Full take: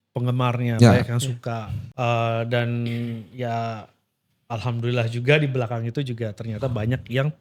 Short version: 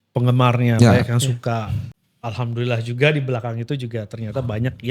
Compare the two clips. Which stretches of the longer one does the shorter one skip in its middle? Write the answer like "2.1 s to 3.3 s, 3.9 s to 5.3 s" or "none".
1.8 s to 4.1 s